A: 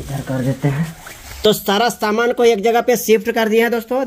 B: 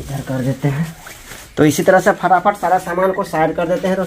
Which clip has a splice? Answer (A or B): A